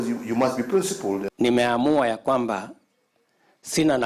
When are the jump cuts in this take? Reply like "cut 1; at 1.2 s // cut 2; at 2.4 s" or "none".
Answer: cut 1; at 1.3 s